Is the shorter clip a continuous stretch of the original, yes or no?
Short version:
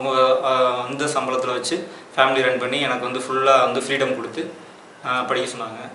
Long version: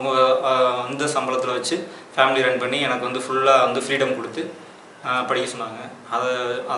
yes